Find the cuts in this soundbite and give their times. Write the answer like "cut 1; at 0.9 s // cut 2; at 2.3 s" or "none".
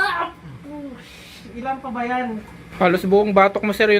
cut 1; at 2.6 s